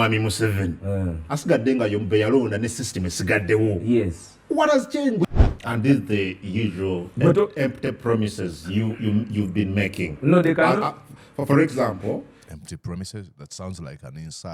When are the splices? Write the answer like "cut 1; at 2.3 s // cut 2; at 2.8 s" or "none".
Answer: cut 1; at 5.2 s